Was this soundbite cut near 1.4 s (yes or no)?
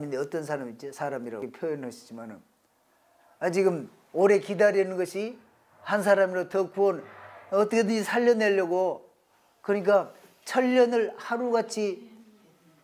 yes